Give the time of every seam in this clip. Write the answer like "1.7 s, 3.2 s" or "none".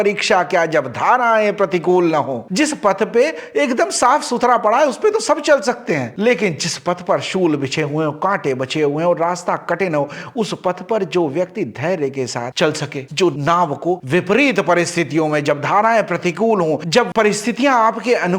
none